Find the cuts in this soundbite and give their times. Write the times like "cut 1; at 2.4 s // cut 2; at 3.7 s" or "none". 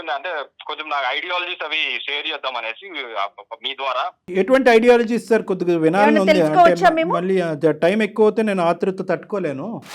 cut 1; at 4.2 s